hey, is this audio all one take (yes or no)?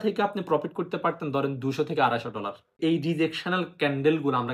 no